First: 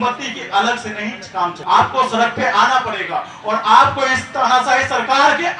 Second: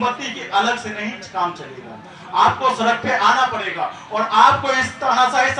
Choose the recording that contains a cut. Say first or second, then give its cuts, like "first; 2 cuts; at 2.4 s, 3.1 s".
first; 1 cut; at 1.6 s